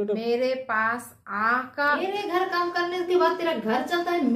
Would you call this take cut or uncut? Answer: cut